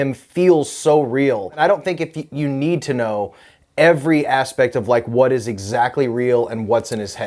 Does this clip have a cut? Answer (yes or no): yes